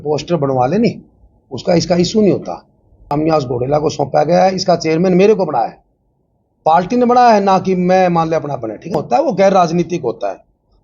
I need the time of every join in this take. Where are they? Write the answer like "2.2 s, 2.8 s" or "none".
3.1 s, 9.0 s